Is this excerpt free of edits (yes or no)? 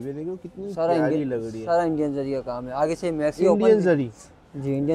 yes